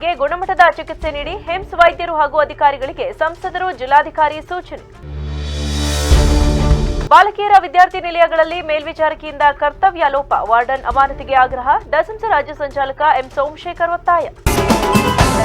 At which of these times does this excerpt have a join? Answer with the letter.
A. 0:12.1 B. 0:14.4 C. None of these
B